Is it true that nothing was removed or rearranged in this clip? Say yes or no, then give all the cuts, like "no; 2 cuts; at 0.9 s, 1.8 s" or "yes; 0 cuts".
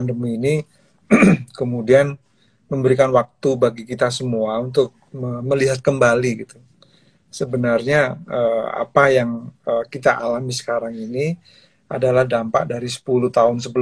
yes; 0 cuts